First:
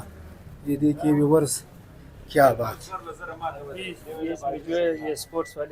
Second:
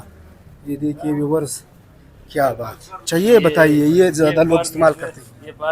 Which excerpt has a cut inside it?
second; 1 cut; at 3.1 s

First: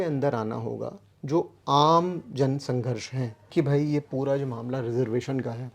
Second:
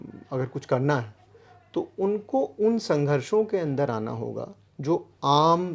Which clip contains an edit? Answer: first; 1 cut; at 3.5 s

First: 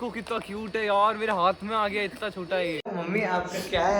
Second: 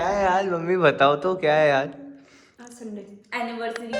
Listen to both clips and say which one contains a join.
first; 1 cut; at 2.9 s

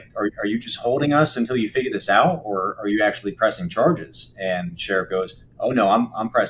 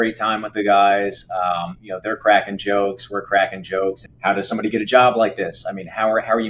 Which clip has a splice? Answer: second; 1 cut; at 4.1 s

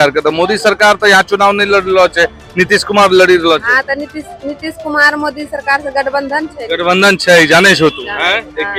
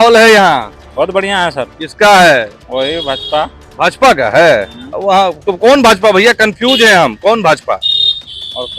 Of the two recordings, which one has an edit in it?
second; 1 cut; at 2.6 s

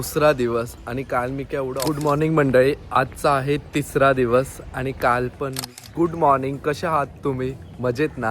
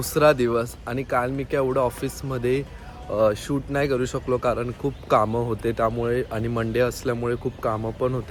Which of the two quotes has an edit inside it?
first; 2 cuts; at 1.8 s, 5.9 s

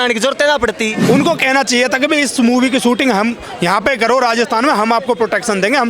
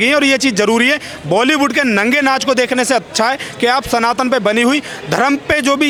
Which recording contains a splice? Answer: first; 1 cut; at 1.0 s

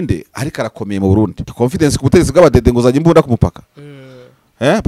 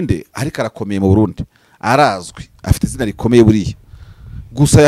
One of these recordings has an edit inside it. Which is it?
first; 1 cut; at 1.4 s

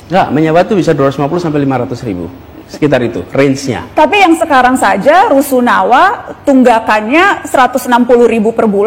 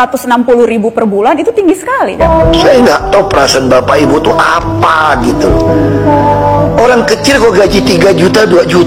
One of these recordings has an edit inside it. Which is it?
second; 1 cut; at 2.2 s

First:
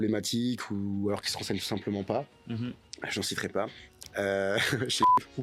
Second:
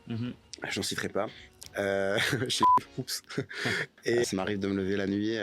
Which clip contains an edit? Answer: second; 1 cut; at 4.2 s

